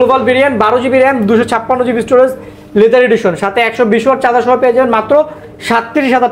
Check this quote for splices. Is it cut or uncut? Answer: uncut